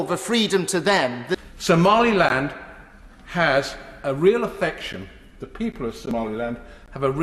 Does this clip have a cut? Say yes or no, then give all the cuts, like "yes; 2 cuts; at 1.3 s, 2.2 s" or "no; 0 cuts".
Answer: yes; 1 cut; at 1.4 s